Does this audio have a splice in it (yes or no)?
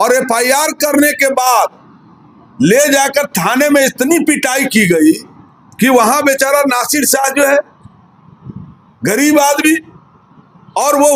no